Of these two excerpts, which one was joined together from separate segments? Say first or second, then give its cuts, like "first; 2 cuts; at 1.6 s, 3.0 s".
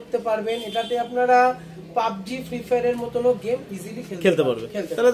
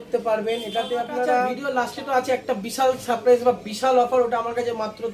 second; 1 cut; at 1.6 s